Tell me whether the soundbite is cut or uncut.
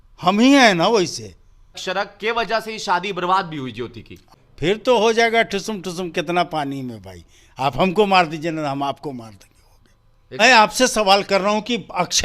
cut